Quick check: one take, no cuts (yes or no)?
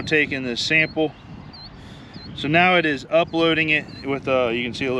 yes